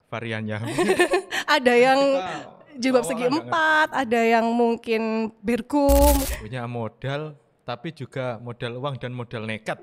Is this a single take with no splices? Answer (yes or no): no